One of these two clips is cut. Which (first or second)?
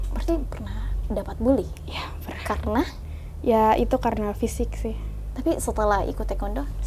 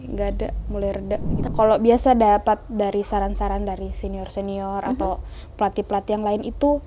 second